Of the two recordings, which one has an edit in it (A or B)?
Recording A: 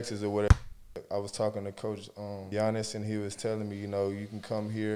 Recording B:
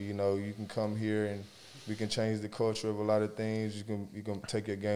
A